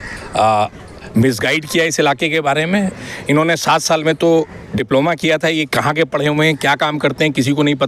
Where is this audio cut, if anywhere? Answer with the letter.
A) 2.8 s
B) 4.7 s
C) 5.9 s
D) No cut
A